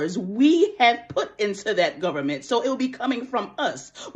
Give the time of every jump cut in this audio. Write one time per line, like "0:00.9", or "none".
none